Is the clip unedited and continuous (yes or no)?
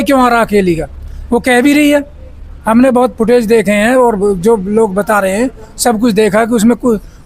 yes